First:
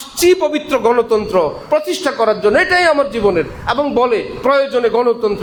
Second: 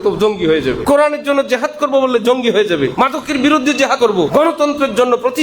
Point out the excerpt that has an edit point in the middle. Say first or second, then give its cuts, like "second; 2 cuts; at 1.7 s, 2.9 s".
second; 3 cuts; at 0.8 s, 2.9 s, 4.1 s